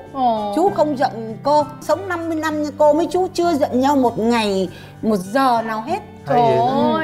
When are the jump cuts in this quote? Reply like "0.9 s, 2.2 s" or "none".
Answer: 1.8 s, 6.1 s